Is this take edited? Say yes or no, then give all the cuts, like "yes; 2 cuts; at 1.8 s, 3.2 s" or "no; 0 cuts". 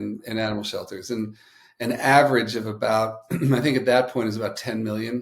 no; 0 cuts